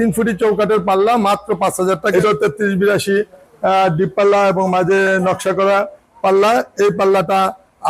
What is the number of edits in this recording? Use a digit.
1